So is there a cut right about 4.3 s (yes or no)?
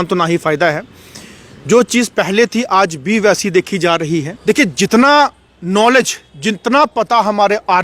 yes